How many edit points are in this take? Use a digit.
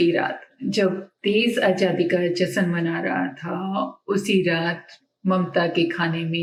0